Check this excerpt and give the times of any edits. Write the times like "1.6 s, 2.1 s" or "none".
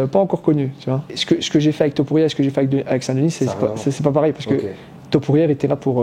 1.1 s